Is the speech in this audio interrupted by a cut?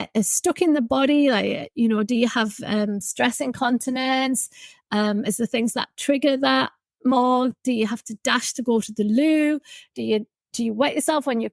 no; 0 cuts

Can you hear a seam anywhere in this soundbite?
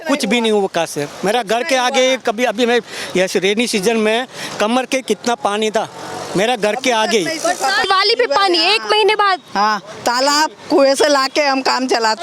yes; 1 cut; at 7.9 s

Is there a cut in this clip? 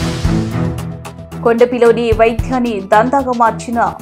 yes; 1 cut; at 1.2 s

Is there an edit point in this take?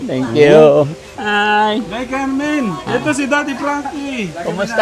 yes; 1 cut; at 1.1 s

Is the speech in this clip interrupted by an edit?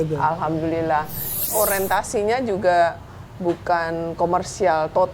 yes; 1 cut; at 1.4 s

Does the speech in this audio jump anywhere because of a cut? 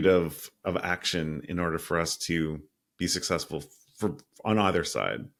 no; 0 cuts

